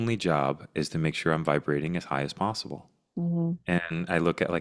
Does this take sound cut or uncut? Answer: uncut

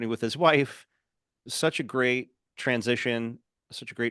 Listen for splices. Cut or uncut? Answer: uncut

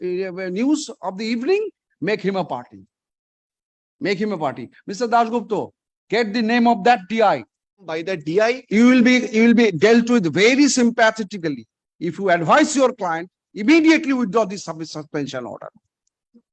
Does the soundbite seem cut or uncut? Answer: cut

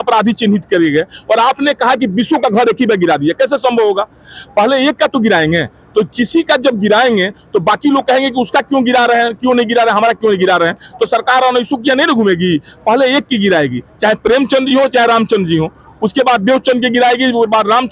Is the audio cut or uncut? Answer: uncut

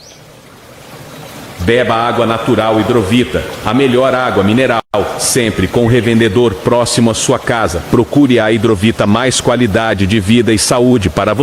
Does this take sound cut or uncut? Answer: uncut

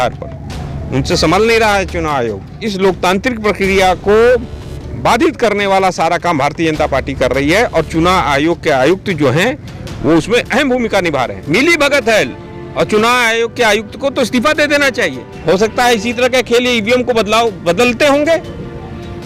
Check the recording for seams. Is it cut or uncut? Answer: cut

